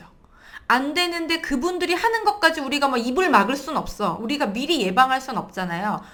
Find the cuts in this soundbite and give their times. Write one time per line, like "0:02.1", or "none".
none